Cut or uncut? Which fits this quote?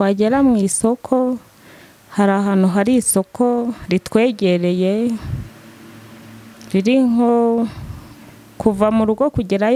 uncut